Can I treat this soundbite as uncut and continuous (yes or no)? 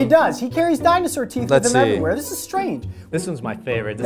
no